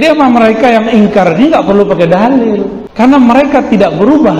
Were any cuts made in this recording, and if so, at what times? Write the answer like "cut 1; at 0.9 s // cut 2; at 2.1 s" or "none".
cut 1; at 2.8 s